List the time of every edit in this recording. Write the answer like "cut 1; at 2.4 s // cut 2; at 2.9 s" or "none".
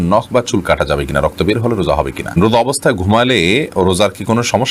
cut 1; at 2.4 s

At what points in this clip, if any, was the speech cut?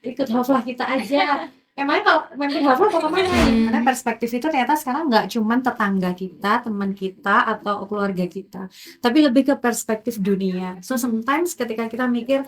cut 1; at 3.4 s

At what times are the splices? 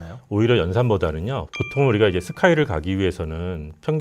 cut 1; at 1.4 s

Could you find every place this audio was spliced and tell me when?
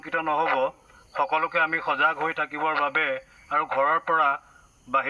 none

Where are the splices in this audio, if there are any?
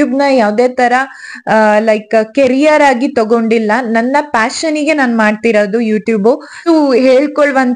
cut 1; at 6.7 s

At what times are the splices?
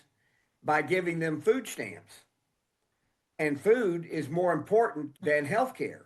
cut 1; at 5.0 s

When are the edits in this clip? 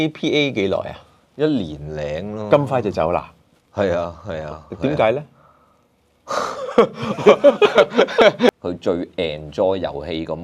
cut 1; at 8.5 s

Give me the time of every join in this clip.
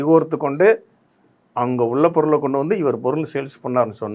none

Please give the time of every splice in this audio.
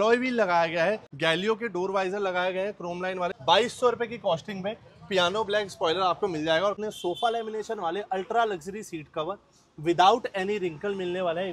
cut 1; at 1.1 s // cut 2; at 3.4 s // cut 3; at 6.8 s

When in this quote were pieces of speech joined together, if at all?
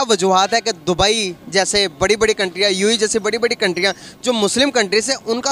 none

